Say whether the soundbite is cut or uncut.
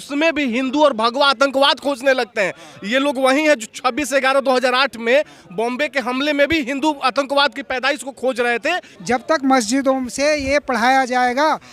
cut